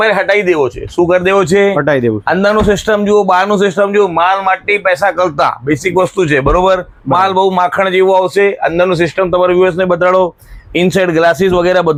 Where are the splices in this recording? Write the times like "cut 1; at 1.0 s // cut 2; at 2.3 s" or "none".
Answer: none